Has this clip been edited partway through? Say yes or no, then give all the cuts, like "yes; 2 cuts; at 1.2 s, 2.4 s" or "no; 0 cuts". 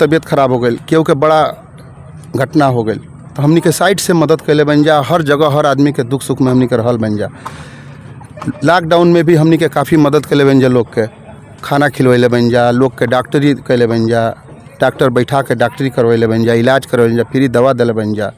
no; 0 cuts